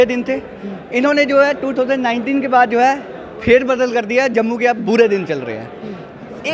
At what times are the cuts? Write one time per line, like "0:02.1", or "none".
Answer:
none